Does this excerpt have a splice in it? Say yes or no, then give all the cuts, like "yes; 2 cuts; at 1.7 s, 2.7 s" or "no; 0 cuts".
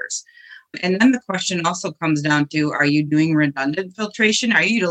no; 0 cuts